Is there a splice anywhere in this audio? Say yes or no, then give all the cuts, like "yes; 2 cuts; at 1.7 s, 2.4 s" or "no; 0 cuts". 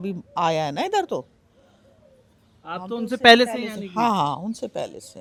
no; 0 cuts